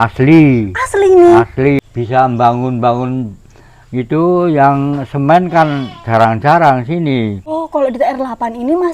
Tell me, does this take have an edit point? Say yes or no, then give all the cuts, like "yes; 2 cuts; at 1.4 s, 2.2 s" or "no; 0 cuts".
yes; 2 cuts; at 1.8 s, 7.6 s